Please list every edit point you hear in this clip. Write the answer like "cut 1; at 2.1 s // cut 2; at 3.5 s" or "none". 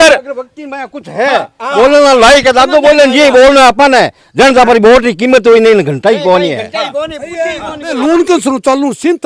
cut 1; at 8.0 s